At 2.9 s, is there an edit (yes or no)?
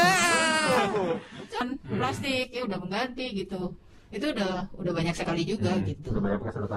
no